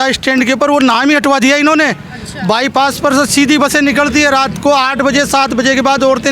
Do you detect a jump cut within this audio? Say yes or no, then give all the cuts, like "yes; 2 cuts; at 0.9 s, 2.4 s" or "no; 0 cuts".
no; 0 cuts